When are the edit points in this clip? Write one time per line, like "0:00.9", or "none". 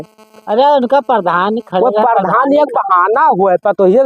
none